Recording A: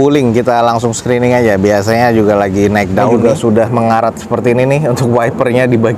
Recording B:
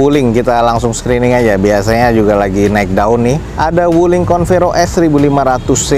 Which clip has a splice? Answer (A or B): A